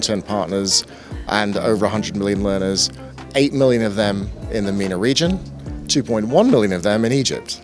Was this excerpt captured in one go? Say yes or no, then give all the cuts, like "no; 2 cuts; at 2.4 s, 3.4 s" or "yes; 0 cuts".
yes; 0 cuts